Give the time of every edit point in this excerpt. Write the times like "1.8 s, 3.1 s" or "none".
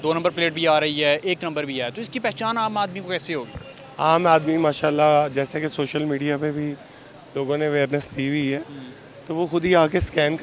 none